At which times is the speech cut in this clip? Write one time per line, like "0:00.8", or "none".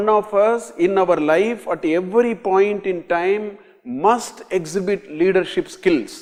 none